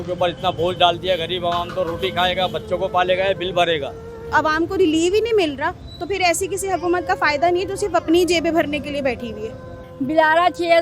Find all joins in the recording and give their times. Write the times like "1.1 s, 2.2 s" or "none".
4.3 s, 9.9 s